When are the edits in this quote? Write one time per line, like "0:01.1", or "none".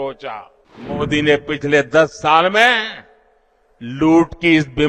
0:01.0